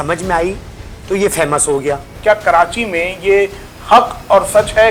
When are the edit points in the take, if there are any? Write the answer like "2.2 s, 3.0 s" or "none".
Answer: 2.1 s